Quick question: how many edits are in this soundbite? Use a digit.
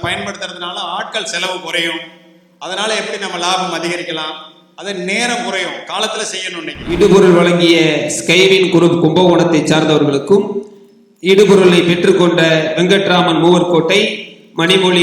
1